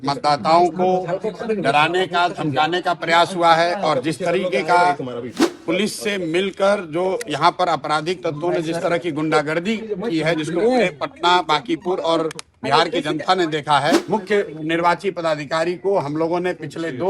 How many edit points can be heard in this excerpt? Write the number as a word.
one